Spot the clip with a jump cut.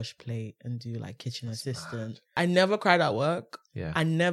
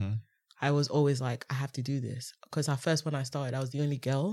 first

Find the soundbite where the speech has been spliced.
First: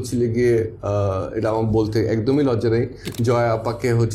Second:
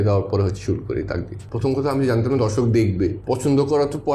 second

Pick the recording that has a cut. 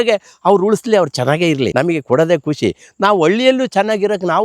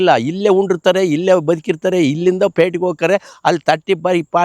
first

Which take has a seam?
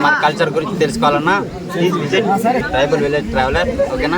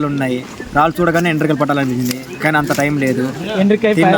first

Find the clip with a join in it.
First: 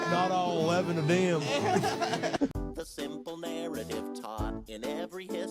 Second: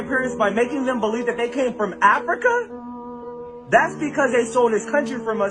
first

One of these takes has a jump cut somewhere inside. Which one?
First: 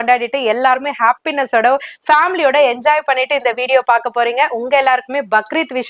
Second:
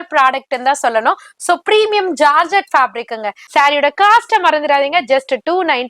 second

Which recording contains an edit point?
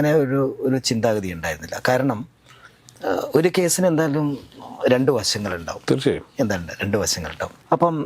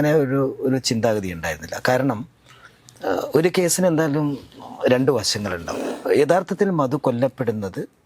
second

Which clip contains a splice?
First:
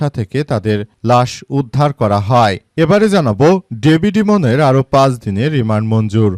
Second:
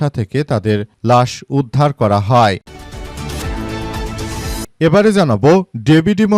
second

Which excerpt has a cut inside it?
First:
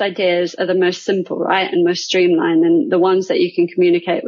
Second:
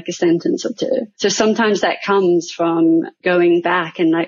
second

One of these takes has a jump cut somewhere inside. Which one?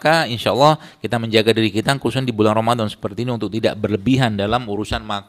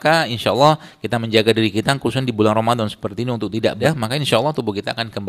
second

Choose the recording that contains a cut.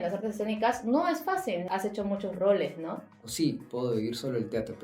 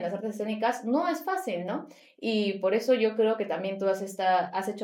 first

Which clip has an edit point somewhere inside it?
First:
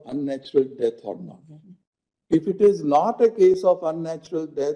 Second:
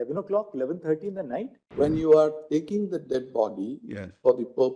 second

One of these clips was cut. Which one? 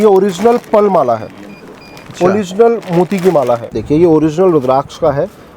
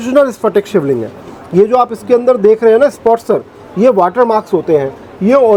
first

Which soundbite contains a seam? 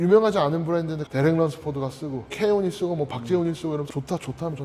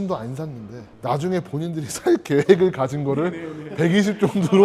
first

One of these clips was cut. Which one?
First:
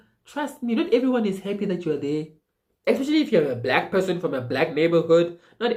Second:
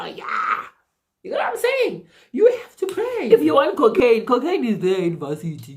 second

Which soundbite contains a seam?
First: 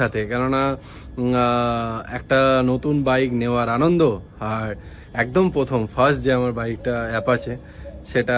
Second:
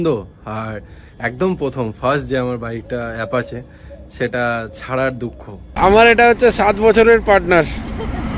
second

